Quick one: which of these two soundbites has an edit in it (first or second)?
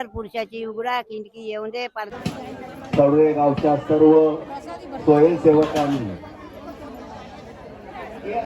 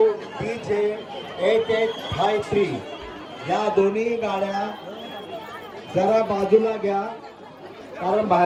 first